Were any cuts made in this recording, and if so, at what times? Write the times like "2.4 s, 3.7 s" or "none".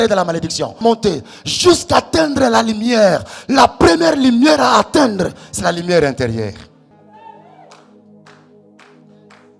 0.8 s, 6.7 s